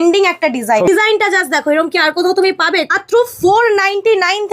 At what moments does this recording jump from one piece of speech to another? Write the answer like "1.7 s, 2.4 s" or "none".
0.9 s, 2.9 s